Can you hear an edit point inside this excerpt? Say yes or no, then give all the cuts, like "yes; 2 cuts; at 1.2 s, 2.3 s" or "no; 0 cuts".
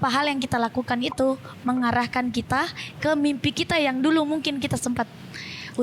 no; 0 cuts